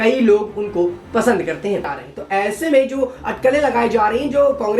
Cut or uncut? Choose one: cut